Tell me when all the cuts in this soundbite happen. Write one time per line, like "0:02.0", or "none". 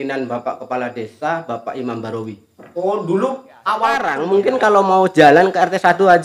0:04.1